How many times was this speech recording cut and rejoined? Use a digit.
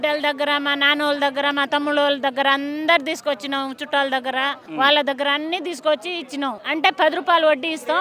2